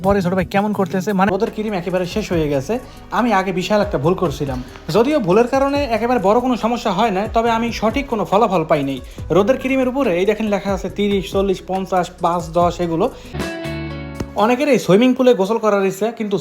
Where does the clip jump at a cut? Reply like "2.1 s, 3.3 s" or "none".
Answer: 1.3 s, 13.4 s